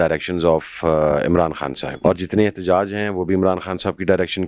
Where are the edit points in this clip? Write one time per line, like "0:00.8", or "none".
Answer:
0:01.8